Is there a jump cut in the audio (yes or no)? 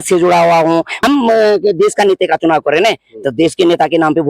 yes